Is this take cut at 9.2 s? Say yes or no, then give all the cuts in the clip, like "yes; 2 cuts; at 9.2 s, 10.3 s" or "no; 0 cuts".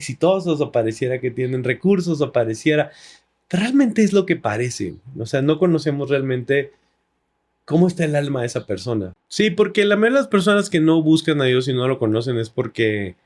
yes; 1 cut; at 9.2 s